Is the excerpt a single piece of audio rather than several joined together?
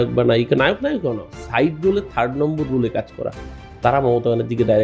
yes; 0 cuts

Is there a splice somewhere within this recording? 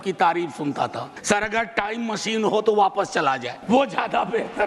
yes; 2 cuts; at 1.1 s, 3.5 s

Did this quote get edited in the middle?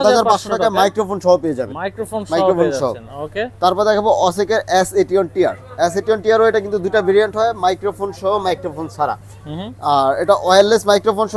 no; 0 cuts

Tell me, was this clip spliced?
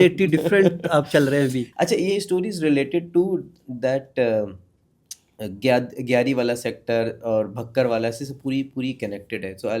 yes; 1 cut; at 1.7 s

